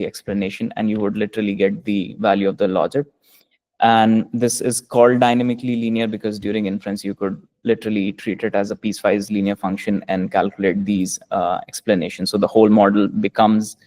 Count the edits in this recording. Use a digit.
1